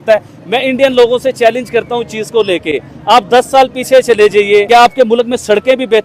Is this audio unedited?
no; 1 cut; at 4.7 s

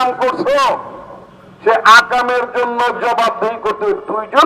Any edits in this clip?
no; 0 cuts

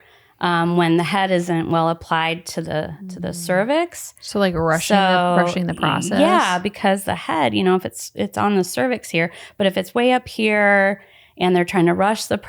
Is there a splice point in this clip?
no; 0 cuts

